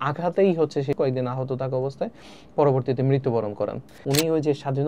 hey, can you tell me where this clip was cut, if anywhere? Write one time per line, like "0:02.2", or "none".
0:01.0
0:03.9